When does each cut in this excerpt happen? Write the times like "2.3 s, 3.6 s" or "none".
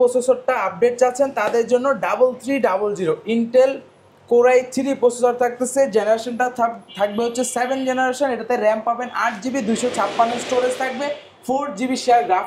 none